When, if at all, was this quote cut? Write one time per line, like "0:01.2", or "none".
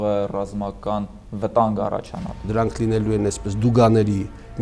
0:02.5

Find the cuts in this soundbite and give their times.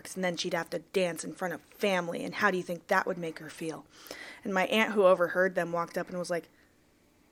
none

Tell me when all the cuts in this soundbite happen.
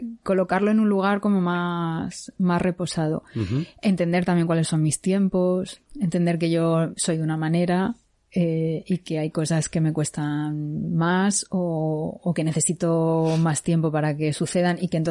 0:07.0

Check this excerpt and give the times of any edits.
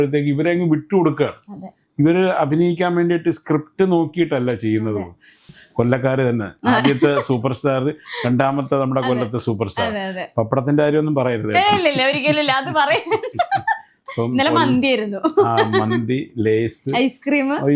0:05.4

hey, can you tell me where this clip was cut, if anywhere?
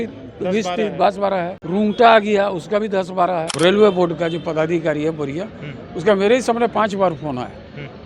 0:01.6
0:03.5

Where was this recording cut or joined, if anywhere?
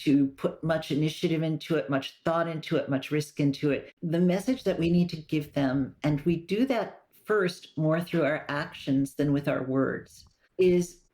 0:03.9

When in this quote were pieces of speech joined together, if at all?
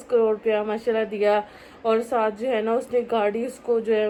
none

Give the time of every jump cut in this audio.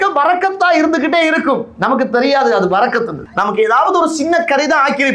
0:03.3

